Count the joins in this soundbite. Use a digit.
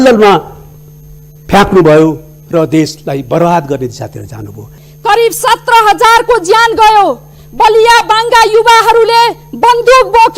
1